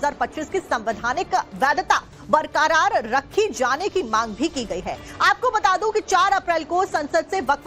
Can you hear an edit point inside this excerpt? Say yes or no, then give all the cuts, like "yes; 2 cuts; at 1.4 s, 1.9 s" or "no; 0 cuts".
no; 0 cuts